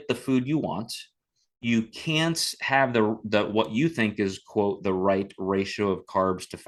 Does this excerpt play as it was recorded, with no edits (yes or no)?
yes